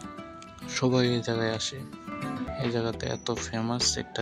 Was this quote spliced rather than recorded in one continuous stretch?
no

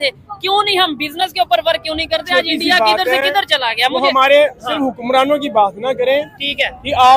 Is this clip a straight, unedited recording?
yes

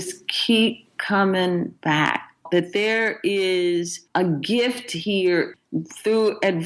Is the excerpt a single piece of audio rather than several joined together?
no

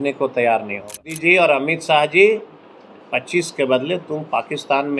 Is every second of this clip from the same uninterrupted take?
no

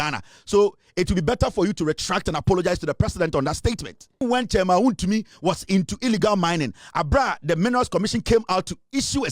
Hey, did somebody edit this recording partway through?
yes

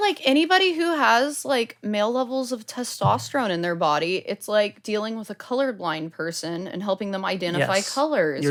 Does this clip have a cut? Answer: no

